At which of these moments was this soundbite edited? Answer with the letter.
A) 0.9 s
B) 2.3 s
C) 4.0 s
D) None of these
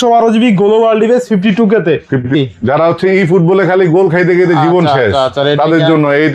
B